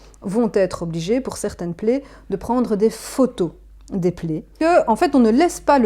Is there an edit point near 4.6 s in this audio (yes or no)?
yes